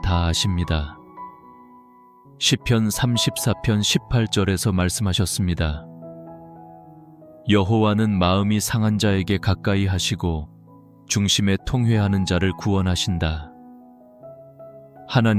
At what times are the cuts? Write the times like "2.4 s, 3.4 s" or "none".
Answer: 5.8 s, 7.4 s